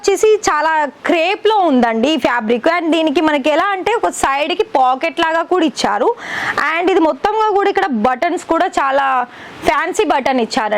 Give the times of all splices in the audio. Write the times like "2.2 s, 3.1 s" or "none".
none